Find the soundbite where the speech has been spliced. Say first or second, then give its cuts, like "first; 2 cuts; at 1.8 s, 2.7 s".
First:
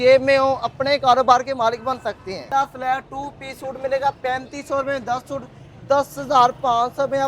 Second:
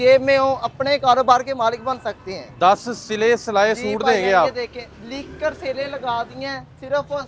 first; 1 cut; at 2.4 s